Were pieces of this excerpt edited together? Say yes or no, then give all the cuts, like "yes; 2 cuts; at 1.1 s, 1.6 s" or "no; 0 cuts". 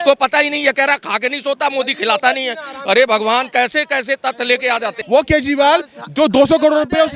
yes; 1 cut; at 5.0 s